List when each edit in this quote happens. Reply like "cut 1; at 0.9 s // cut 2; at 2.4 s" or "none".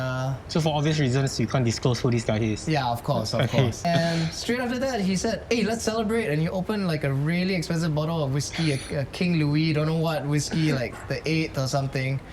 cut 1; at 3.8 s